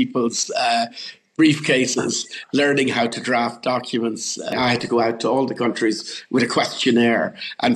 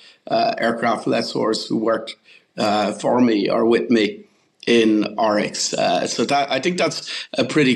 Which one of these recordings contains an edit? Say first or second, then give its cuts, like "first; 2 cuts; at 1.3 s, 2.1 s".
first; 1 cut; at 4.5 s